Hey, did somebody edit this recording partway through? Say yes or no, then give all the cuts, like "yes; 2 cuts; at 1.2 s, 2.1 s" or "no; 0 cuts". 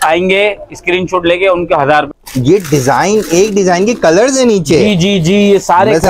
yes; 1 cut; at 2.1 s